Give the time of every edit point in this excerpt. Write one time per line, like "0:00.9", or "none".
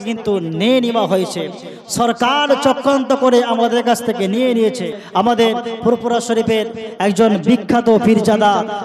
0:05.0

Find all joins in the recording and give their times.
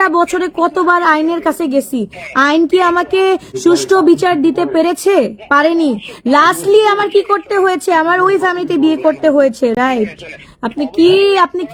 none

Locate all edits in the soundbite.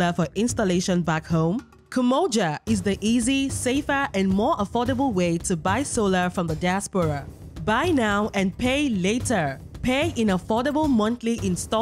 none

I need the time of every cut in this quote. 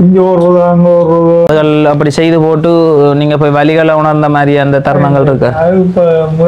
0:01.5

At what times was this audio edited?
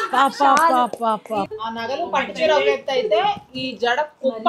0:01.5

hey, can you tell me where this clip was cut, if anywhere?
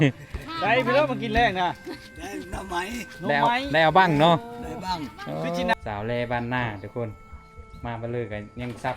0:05.7

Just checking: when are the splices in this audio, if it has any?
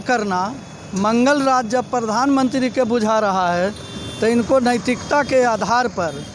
none

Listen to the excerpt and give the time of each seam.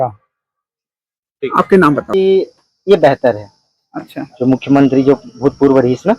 0:02.1

